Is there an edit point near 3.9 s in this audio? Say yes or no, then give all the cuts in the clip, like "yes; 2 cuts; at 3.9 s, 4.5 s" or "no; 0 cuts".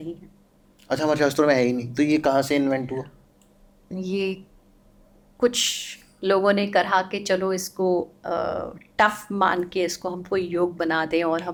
no; 0 cuts